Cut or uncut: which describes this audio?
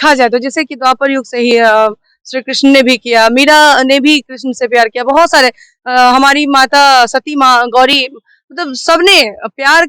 uncut